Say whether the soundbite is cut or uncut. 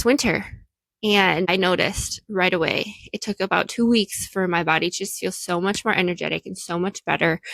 cut